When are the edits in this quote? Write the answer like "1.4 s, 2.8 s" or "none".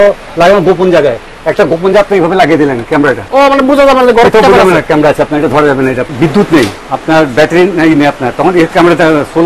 3.2 s, 6.1 s, 6.8 s